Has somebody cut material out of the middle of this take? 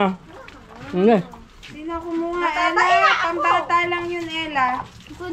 no; 0 cuts

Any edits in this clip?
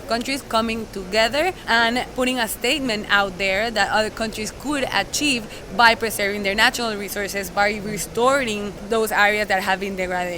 yes; 3 cuts; at 1.9 s, 7.5 s, 8.8 s

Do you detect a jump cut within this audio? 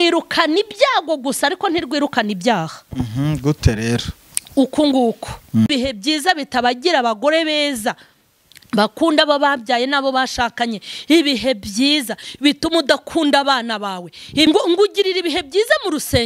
yes; 2 cuts; at 5.7 s, 14.5 s

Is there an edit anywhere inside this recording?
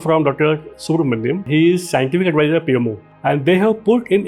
yes; 1 cut; at 3.0 s

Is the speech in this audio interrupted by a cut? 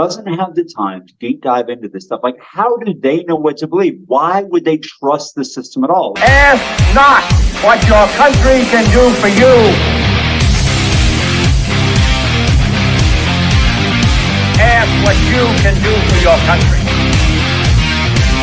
yes; 1 cut; at 6.1 s

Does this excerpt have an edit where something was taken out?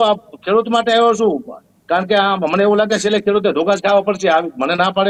no; 0 cuts

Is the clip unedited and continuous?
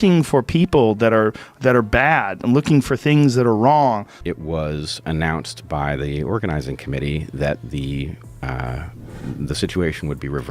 no; 1 cut; at 4.2 s

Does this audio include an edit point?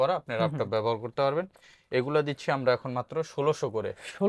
no; 0 cuts

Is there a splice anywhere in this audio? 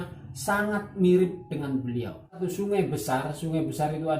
yes; 1 cut; at 2.4 s

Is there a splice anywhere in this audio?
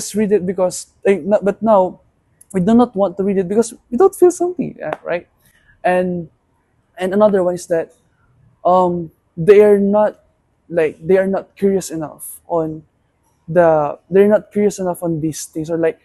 no; 0 cuts

